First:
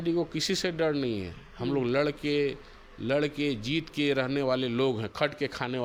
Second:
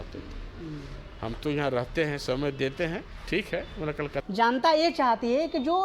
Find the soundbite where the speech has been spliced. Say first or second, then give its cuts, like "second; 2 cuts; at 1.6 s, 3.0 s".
second; 1 cut; at 4.2 s